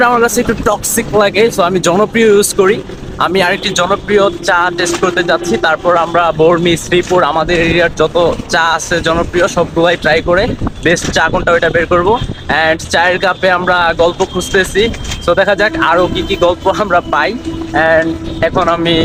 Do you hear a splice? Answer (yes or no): no